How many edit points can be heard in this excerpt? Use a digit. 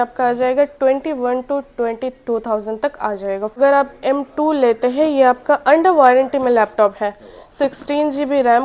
1